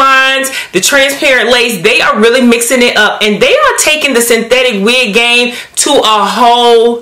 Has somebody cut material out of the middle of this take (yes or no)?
no